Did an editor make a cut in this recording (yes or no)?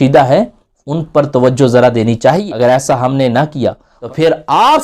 yes